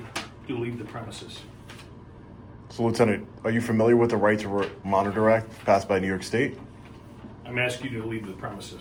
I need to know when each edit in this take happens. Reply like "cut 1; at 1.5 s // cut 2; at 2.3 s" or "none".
none